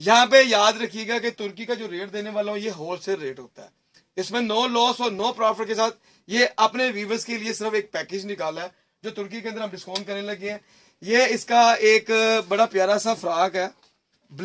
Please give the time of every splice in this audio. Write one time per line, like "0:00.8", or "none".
none